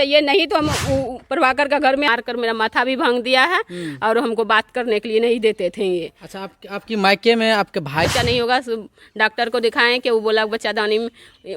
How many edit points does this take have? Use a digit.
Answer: 2